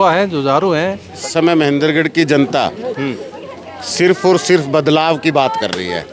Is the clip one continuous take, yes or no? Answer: no